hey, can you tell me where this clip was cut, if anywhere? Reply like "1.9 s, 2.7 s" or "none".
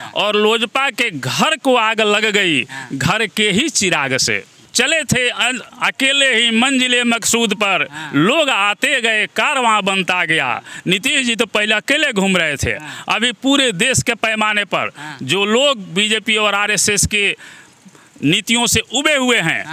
4.6 s